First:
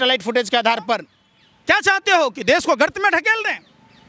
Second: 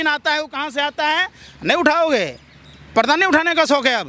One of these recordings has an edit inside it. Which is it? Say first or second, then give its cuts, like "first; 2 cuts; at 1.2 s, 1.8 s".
first; 1 cut; at 1.1 s